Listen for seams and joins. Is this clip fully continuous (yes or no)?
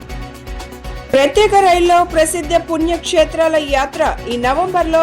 no